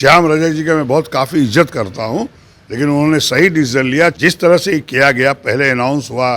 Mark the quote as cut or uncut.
cut